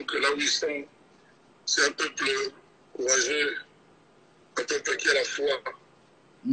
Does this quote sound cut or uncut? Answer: uncut